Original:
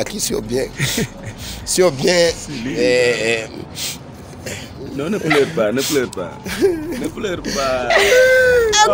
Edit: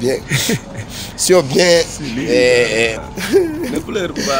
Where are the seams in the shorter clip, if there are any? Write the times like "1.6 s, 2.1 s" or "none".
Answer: 3.1 s